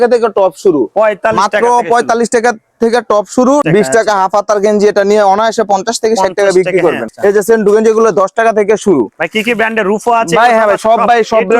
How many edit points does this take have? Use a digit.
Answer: 2